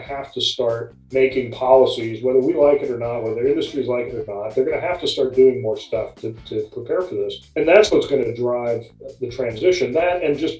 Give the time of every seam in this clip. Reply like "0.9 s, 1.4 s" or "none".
1.0 s